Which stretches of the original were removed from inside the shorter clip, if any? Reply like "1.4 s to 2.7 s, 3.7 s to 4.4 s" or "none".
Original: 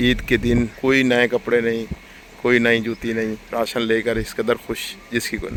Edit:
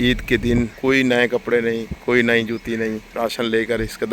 1.9 s to 2.3 s